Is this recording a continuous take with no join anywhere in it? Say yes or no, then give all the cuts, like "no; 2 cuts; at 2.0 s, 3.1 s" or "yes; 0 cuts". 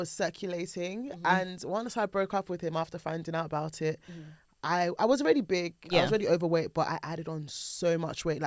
yes; 0 cuts